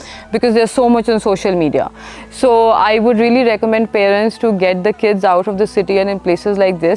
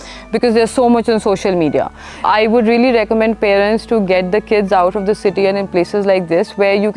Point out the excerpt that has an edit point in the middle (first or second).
second